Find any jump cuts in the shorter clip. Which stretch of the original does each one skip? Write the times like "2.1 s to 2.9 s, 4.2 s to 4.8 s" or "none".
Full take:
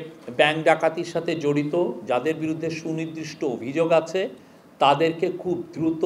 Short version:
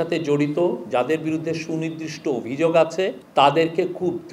4.4 s to 4.6 s